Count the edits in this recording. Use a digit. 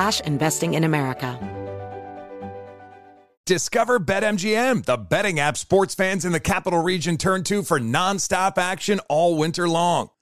1